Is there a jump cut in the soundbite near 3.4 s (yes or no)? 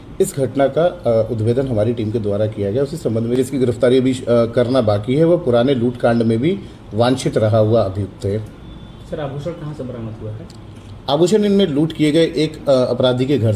yes